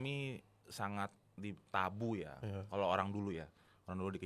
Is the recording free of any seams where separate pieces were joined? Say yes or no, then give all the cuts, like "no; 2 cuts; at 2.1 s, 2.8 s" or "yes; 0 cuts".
yes; 0 cuts